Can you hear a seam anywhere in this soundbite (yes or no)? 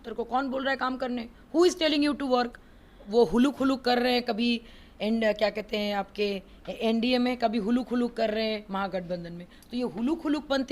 yes